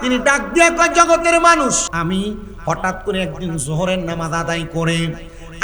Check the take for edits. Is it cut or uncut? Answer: cut